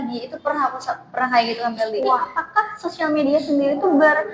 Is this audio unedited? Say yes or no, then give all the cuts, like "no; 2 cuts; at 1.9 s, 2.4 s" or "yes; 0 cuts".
no; 1 cut; at 2.3 s